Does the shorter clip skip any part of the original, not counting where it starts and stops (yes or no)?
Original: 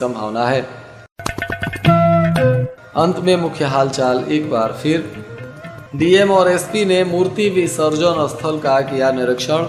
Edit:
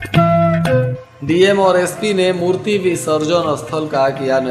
yes